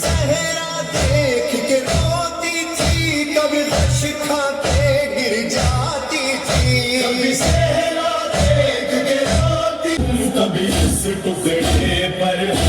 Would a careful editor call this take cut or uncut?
cut